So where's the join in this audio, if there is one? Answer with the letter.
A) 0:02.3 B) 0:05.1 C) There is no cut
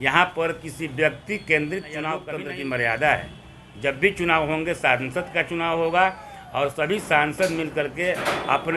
A